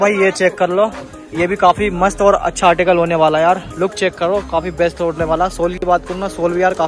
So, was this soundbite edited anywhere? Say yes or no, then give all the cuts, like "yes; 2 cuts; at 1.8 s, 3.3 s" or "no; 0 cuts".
no; 0 cuts